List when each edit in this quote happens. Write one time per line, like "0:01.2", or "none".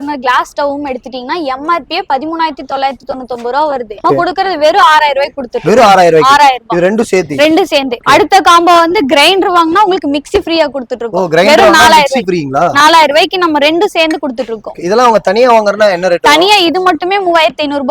none